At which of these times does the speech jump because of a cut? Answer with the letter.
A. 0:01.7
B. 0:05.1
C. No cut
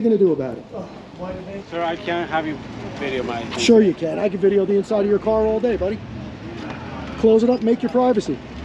A